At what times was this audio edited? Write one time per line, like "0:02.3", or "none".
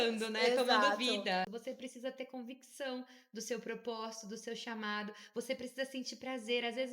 0:01.5